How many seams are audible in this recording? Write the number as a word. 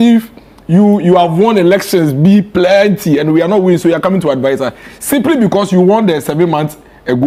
zero